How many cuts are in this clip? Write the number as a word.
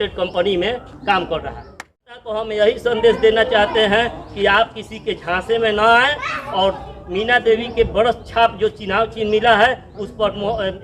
one